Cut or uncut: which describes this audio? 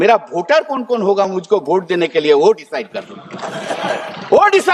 uncut